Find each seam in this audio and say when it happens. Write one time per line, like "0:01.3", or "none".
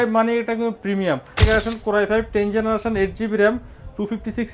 0:01.4